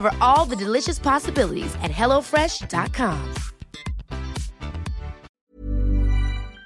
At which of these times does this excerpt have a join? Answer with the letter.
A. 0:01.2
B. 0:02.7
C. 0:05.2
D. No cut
C